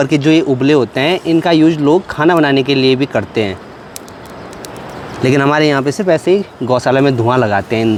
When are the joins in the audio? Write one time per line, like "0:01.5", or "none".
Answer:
none